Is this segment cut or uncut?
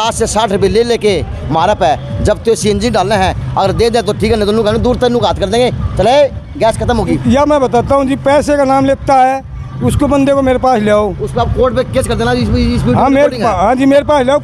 uncut